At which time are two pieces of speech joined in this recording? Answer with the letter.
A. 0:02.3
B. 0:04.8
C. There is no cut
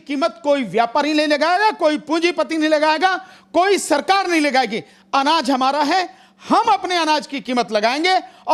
C